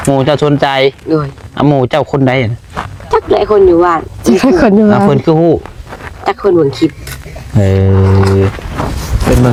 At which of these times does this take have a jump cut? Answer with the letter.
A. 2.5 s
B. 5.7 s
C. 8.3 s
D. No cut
D